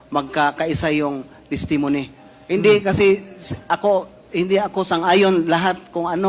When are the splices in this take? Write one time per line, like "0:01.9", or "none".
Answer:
0:01.1